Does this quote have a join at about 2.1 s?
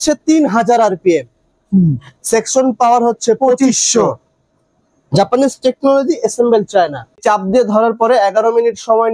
no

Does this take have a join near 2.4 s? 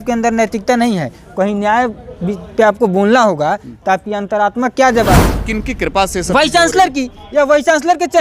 no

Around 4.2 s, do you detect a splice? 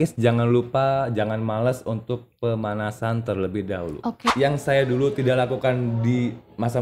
yes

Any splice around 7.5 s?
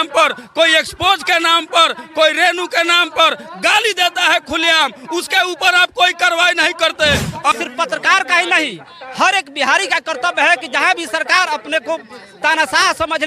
yes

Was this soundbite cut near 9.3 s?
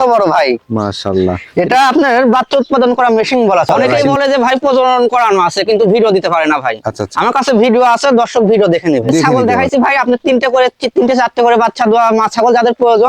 yes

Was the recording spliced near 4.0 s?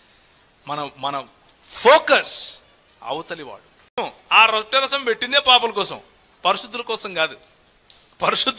yes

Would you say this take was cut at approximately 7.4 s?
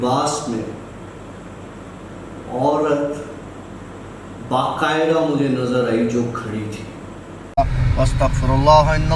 yes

